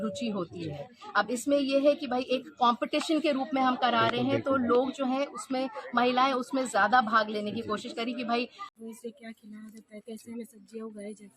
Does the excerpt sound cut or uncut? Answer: cut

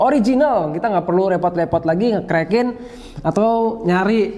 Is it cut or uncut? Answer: uncut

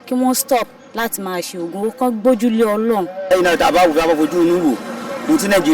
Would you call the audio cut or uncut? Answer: cut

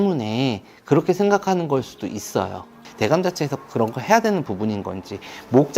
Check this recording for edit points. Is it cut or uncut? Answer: cut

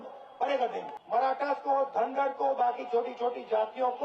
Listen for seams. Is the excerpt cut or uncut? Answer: cut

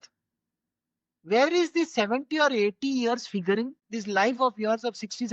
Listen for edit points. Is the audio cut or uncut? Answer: cut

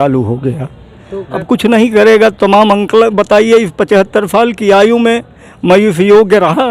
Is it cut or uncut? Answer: cut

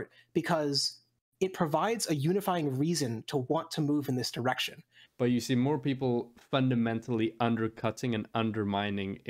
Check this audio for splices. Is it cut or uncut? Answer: cut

